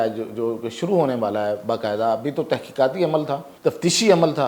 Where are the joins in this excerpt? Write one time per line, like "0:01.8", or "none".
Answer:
0:03.5